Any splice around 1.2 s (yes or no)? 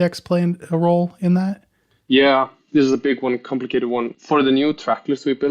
no